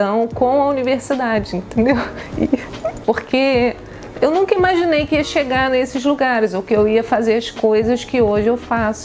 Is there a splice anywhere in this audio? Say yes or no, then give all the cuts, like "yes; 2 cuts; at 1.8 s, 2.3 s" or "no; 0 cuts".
yes; 1 cut; at 3.0 s